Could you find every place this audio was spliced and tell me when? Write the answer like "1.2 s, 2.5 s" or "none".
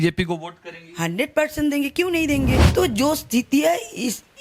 2.6 s